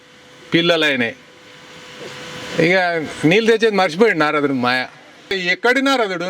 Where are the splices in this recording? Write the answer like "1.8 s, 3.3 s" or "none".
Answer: 5.3 s